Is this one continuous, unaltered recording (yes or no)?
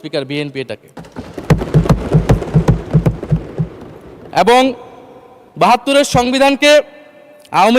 yes